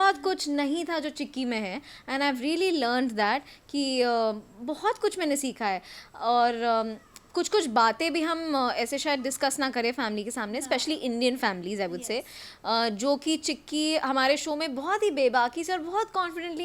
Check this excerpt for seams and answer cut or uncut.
uncut